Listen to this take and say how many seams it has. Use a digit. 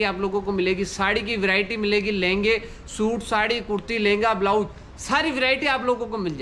0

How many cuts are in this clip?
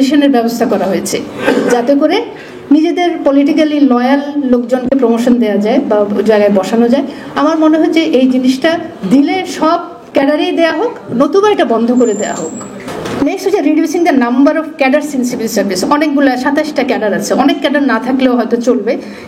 1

